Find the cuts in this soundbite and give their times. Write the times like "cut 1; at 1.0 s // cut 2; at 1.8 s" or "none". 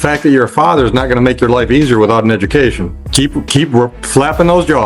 cut 1; at 3.0 s

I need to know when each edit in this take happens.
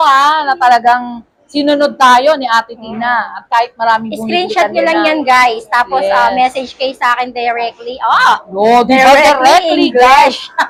none

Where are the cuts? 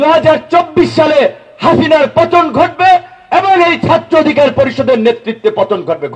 none

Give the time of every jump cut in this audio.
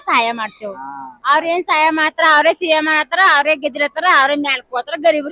none

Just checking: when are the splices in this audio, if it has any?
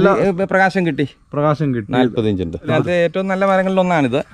cut 1; at 2.7 s

